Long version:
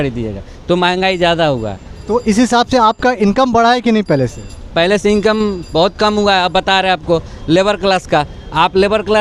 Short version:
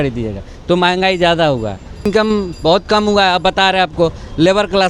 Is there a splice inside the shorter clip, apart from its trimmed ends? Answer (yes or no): yes